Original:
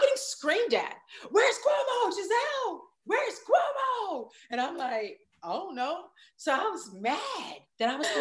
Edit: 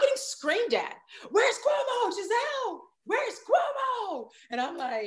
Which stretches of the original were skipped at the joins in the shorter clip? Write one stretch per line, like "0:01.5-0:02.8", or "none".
none